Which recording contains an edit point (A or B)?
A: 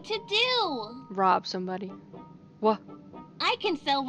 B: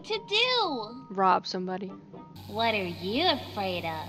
B